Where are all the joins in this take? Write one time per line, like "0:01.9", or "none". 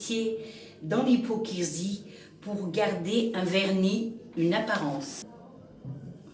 0:05.2